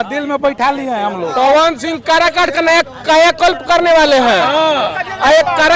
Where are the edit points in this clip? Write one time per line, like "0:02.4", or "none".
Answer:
0:01.3